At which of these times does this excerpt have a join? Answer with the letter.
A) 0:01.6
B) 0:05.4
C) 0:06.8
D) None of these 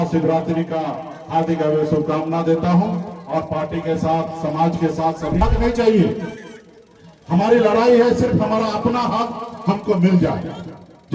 B